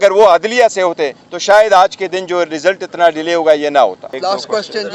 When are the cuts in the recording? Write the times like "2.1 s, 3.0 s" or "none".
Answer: none